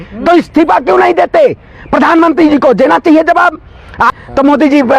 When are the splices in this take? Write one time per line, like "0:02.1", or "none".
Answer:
0:04.1